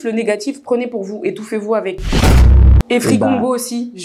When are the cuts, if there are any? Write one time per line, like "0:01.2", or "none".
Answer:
0:02.4

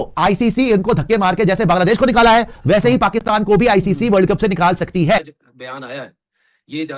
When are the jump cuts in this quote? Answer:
0:05.3

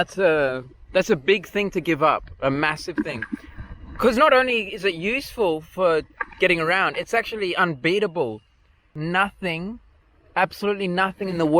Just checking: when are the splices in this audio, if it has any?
0:08.8

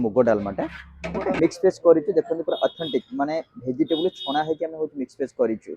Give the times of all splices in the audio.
0:01.4

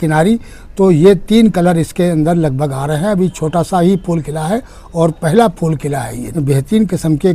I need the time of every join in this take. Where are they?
0:06.2

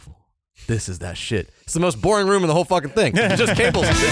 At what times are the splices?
none

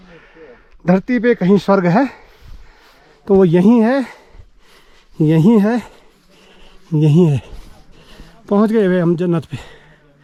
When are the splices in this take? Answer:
none

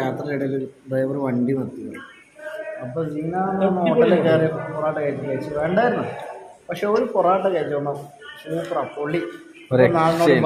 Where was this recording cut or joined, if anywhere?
none

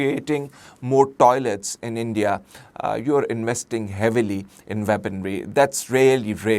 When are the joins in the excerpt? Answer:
none

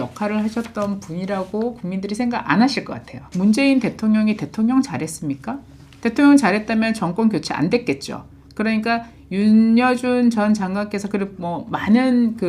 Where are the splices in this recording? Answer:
0:03.3

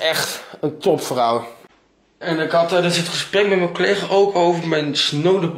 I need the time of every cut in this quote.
0:01.6

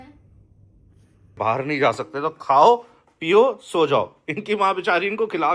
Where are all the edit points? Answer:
0:01.4

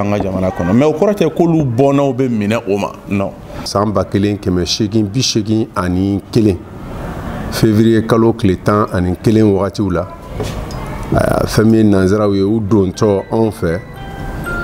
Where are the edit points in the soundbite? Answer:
0:03.6

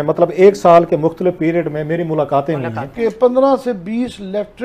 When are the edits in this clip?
0:02.9

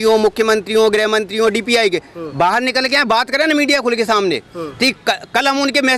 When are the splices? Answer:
none

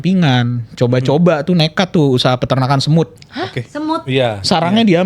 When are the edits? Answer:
0:03.2

